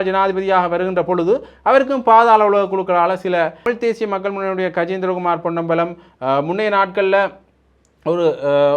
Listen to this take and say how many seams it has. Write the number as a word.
one